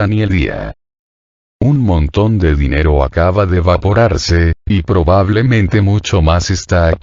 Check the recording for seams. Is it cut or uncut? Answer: cut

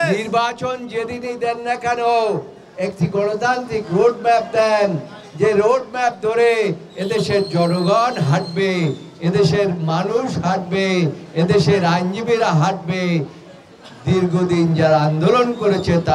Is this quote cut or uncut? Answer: uncut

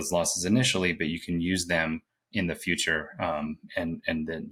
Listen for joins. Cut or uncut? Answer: uncut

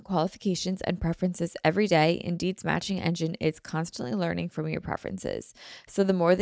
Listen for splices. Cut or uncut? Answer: uncut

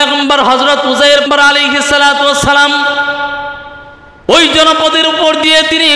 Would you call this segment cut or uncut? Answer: cut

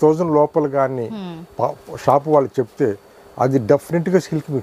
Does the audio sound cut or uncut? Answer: uncut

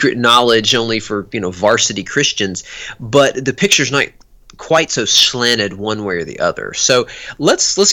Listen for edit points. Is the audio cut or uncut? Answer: uncut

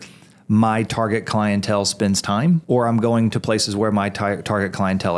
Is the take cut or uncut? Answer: cut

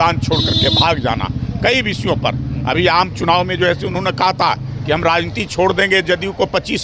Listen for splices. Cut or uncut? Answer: uncut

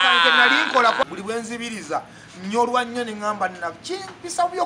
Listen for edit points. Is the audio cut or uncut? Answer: cut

